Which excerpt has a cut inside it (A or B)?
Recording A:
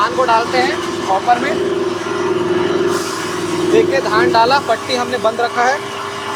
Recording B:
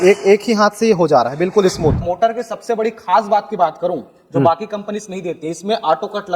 B